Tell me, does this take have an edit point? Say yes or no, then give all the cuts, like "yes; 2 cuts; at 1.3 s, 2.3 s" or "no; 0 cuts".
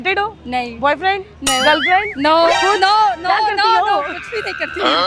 no; 0 cuts